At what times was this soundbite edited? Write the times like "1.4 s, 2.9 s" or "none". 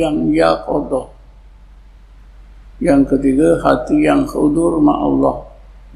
none